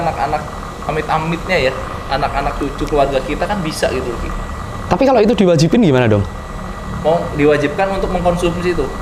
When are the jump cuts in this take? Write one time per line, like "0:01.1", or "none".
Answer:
none